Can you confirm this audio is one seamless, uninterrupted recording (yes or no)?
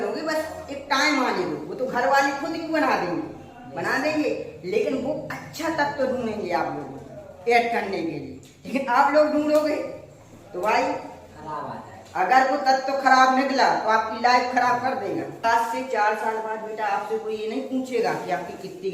no